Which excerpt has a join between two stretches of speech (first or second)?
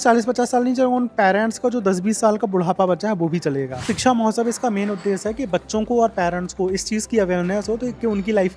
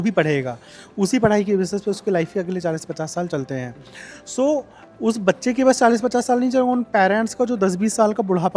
first